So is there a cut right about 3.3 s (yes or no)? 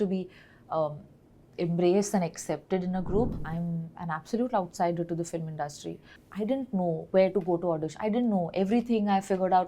yes